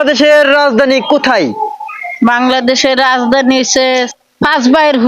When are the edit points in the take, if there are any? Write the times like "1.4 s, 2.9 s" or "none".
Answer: 4.1 s